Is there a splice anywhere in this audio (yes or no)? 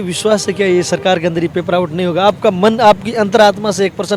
no